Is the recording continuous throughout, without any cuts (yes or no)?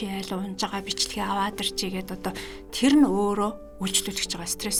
yes